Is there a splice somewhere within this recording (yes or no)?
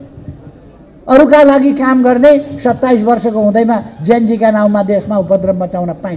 no